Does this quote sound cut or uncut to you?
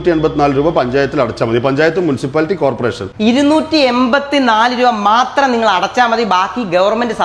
uncut